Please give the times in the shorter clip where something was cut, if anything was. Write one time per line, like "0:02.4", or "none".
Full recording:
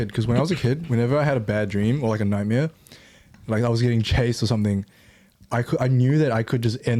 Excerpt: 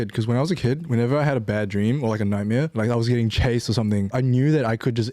0:02.7
0:04.1